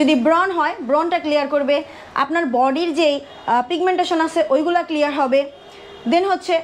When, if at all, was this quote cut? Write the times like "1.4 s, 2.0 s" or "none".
none